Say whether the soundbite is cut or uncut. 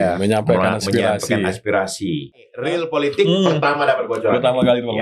cut